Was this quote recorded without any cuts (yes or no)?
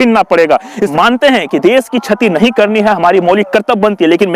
no